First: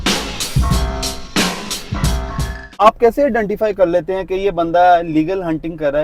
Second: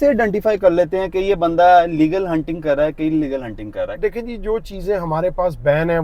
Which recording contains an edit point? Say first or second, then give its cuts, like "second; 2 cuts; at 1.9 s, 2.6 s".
second; 1 cut; at 3.9 s